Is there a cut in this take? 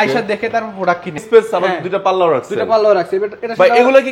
yes; 1 cut; at 1.2 s

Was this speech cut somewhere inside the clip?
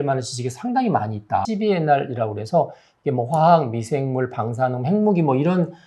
yes; 1 cut; at 1.4 s

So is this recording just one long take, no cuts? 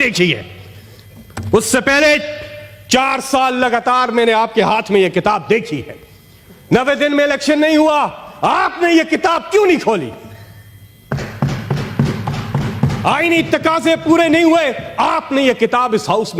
yes; 0 cuts

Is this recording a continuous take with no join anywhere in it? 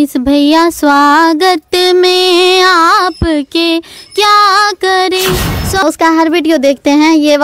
no; 1 cut; at 5.8 s

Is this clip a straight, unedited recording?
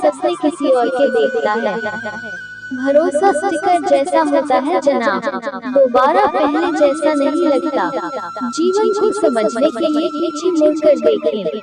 yes; 0 cuts

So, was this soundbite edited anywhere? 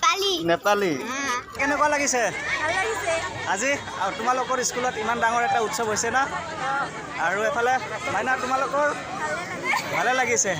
yes; 1 cut; at 1.6 s

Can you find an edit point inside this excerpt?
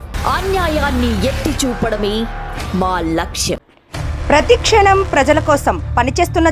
no; 0 cuts

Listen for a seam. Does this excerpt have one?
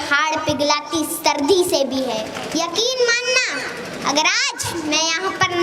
yes; 1 cut; at 2.4 s

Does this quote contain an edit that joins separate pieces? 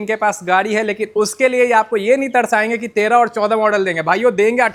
no; 0 cuts

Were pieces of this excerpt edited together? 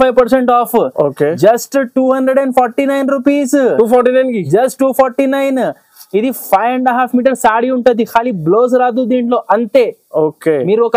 no; 0 cuts

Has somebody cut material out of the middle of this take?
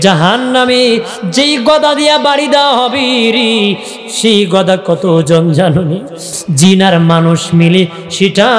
yes; 1 cut; at 6.4 s

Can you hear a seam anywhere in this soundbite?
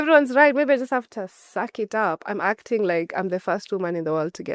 no; 0 cuts

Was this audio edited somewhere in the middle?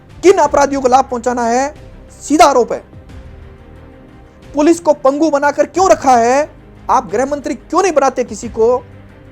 yes; 2 cuts; at 2.9 s, 4.5 s

